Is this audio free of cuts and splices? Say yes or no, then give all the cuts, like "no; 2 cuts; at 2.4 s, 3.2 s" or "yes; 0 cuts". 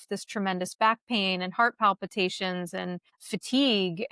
no; 1 cut; at 3.1 s